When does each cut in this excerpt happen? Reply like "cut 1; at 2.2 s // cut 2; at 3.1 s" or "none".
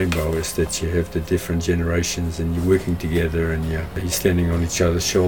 cut 1; at 4.0 s